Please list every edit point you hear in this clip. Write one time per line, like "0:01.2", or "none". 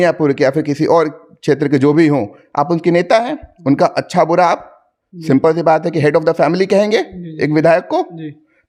none